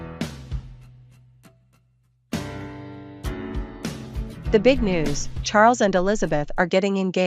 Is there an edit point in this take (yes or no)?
yes